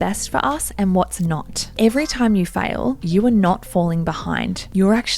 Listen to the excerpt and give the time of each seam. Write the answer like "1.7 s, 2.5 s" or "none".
1.8 s